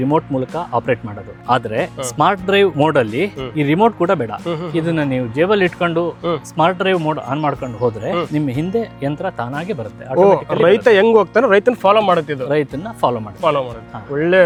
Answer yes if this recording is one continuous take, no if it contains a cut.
yes